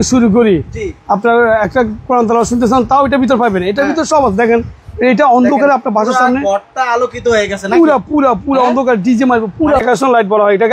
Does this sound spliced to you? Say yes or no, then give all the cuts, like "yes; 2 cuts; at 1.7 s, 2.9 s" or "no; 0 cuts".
yes; 1 cut; at 9.8 s